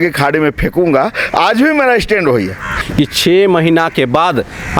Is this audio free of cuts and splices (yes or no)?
no